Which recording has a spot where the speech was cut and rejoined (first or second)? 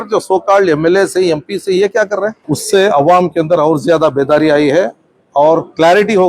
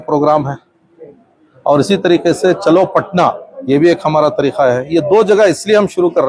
first